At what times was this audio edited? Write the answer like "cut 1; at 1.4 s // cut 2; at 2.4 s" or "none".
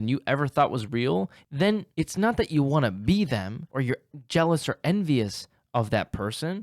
cut 1; at 1.4 s // cut 2; at 3.6 s